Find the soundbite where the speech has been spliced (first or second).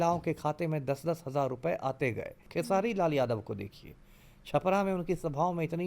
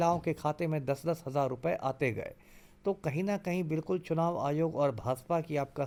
first